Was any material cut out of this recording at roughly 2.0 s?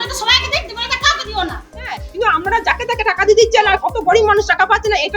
yes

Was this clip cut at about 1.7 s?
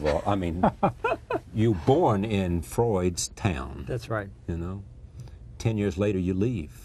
no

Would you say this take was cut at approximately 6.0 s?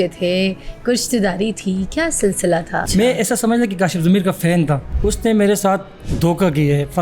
yes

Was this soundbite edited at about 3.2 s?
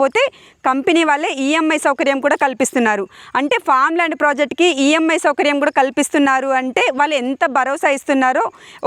no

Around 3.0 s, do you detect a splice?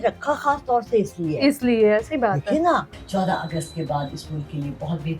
yes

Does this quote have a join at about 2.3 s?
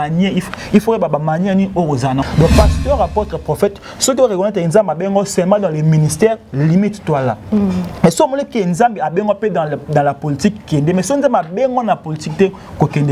yes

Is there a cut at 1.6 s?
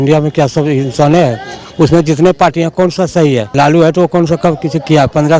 no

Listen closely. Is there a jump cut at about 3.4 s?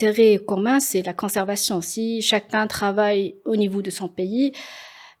no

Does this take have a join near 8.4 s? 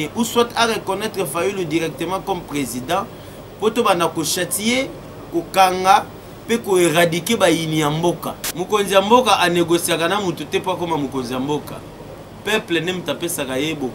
yes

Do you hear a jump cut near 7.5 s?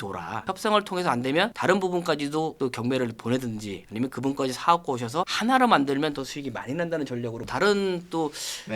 yes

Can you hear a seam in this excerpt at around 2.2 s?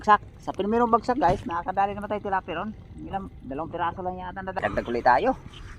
no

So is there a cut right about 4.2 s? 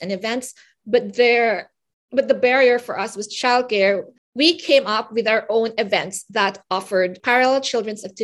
yes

